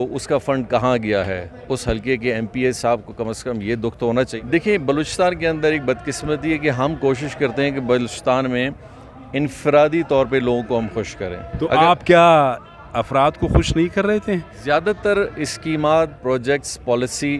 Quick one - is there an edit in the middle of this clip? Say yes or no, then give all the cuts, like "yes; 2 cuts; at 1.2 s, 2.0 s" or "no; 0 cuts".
yes; 3 cuts; at 4.3 s, 11.4 s, 14.5 s